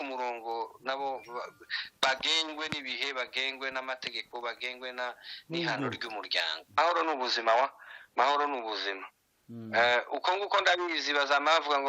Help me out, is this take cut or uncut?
cut